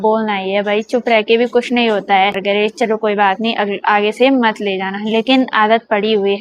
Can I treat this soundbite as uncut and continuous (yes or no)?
no